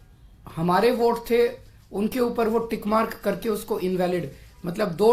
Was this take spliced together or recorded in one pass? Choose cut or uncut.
uncut